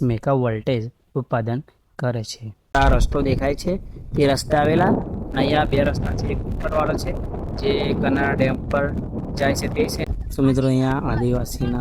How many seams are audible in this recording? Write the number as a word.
two